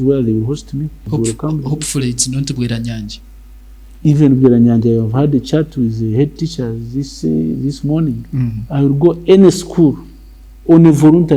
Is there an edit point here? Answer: yes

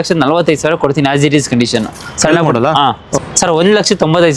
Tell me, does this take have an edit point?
yes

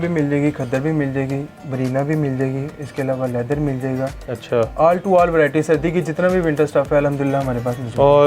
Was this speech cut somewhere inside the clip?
yes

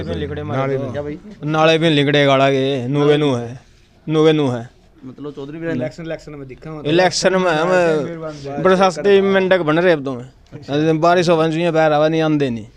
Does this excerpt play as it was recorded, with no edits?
no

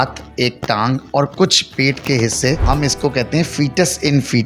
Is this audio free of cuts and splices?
no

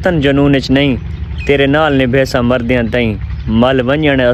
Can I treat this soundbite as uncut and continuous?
yes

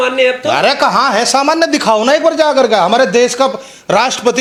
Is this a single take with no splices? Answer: yes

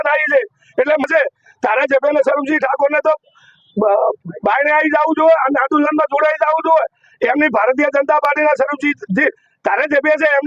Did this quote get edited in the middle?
yes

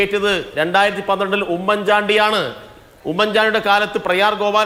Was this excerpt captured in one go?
yes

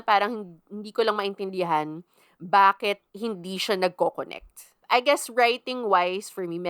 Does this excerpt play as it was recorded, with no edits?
no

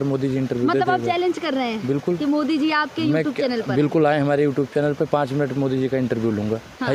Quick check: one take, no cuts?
yes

